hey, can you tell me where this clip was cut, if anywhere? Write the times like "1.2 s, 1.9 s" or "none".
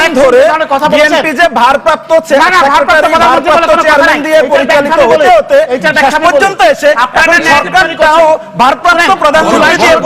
none